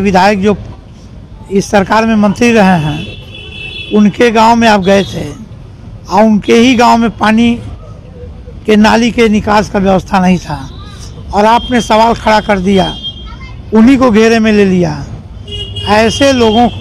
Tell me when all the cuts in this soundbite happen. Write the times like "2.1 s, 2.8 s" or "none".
none